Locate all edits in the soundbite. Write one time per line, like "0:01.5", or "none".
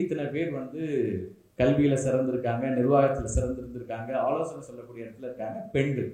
0:01.4

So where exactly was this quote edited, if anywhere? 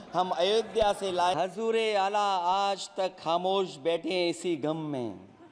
0:01.3

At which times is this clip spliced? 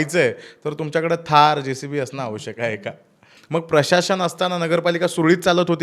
0:03.3

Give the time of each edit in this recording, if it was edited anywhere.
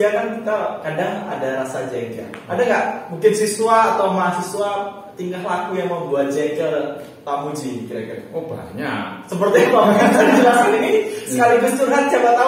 none

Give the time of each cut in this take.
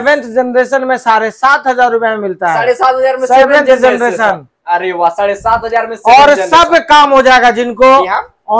none

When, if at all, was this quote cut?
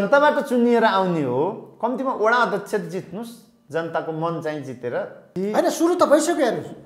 0:05.2

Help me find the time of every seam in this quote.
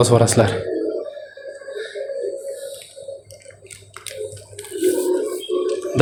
none

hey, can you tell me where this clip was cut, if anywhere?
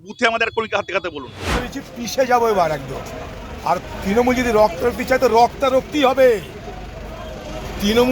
0:01.7

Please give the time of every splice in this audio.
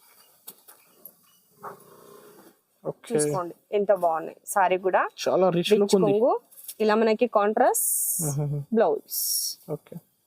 0:02.6

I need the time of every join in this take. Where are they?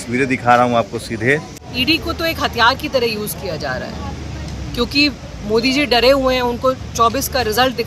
0:01.6

